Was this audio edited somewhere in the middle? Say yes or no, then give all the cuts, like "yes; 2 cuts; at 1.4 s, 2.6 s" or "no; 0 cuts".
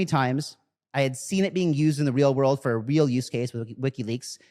no; 0 cuts